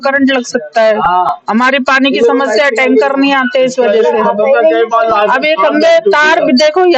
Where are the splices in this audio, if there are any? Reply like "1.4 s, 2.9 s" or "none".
none